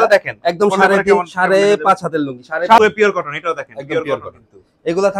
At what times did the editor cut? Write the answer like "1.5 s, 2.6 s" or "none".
2.8 s